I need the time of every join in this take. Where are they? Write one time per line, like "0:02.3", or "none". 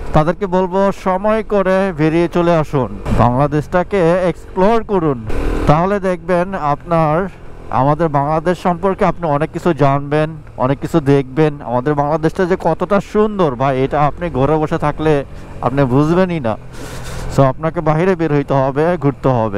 0:03.0
0:05.3

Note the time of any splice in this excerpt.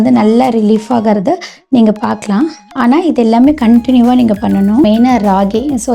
0:04.9

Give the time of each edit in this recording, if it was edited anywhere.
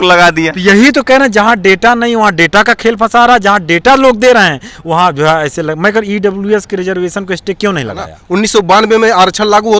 0:08.1

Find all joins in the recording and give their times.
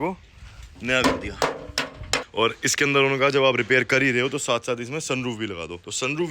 0:02.3

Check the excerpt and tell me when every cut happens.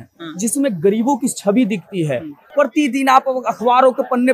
0:02.5

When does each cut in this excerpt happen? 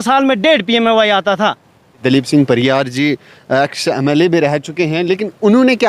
0:02.0

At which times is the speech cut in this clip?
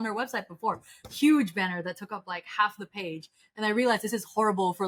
none

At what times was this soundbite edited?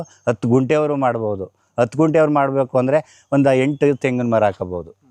none

